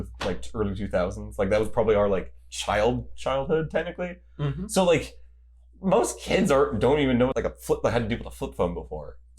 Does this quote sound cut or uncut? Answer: cut